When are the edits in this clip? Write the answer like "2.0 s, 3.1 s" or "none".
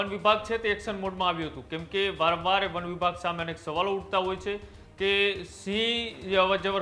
none